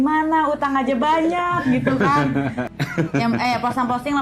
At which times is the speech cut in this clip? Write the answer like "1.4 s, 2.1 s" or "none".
2.7 s

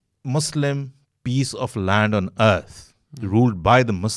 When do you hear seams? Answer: none

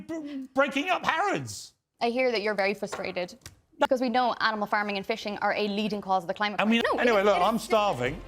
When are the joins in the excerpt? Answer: 3.9 s, 6.8 s

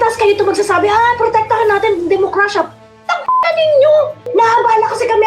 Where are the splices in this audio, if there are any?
4.2 s

